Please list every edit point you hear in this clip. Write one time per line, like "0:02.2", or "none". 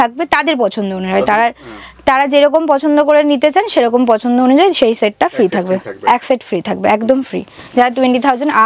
none